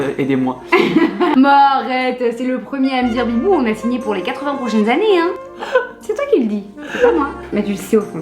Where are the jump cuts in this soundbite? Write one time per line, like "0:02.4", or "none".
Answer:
0:01.3